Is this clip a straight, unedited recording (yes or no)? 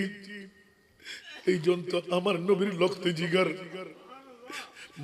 yes